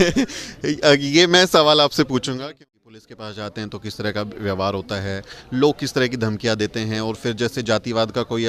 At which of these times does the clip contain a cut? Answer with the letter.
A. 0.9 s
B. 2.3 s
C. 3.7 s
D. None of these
B